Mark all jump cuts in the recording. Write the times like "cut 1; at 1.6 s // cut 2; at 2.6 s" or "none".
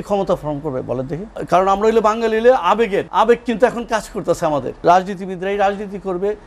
cut 1; at 1.3 s // cut 2; at 3.1 s // cut 3; at 4.7 s